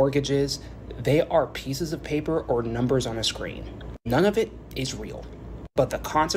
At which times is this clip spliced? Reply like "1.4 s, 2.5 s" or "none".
none